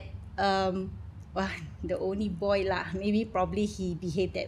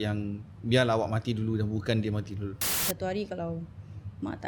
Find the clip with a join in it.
second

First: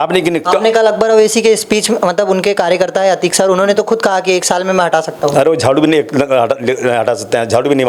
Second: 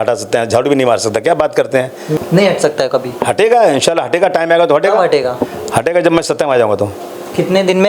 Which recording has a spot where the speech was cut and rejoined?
second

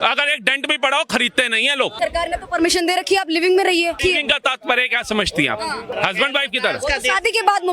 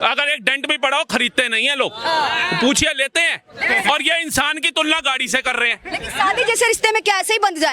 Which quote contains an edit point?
first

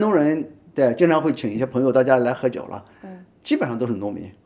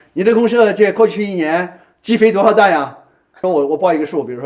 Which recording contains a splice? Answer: second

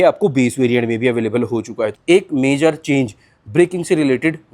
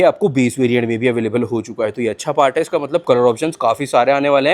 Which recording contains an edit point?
first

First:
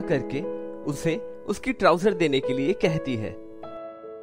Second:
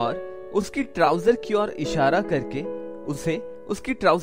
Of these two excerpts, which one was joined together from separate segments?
first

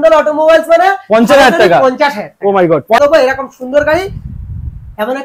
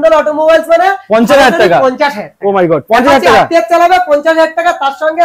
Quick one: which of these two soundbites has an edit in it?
first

